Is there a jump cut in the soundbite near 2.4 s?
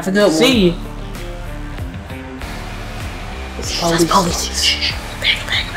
yes; 1 cut; at 2.4 s

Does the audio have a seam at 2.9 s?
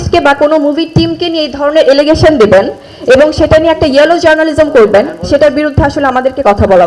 no; 0 cuts

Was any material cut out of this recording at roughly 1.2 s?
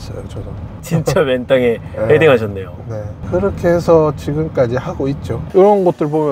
no; 1 cut; at 5.3 s

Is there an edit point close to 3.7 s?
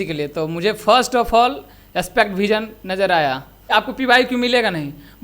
yes; 1 cut; at 3.7 s

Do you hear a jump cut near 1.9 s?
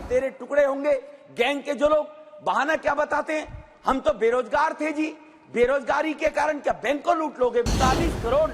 no; 1 cut; at 7.6 s

